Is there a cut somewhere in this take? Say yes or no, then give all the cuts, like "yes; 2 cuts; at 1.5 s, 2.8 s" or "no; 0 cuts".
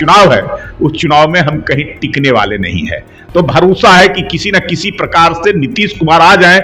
no; 0 cuts